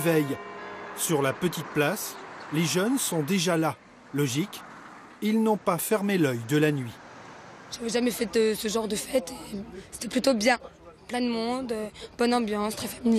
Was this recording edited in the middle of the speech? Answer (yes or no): no